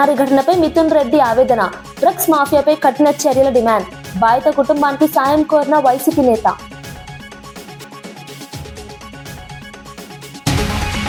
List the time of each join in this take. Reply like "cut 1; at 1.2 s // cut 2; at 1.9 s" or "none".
none